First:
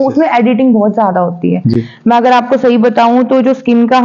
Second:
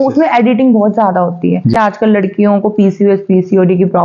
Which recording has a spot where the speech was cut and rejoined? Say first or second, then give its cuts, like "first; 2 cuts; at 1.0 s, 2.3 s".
second; 1 cut; at 1.7 s